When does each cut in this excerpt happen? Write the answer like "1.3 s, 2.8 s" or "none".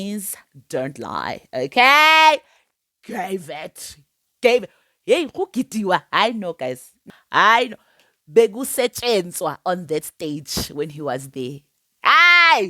6.9 s